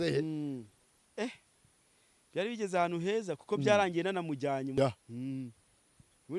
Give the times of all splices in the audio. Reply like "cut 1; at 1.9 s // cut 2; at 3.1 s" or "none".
cut 1; at 4.8 s